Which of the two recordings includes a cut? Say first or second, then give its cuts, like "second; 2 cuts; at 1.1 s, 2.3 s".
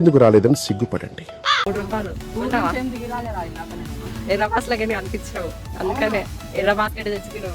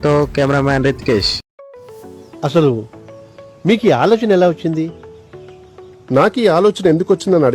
first; 1 cut; at 1.7 s